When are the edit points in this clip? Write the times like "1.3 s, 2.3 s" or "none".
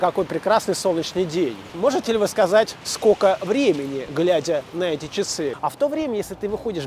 1.6 s, 2.8 s, 5.6 s